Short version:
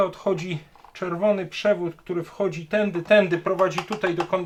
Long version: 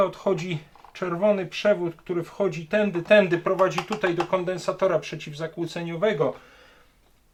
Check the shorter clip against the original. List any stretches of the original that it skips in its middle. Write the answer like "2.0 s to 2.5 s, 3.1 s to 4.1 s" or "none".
none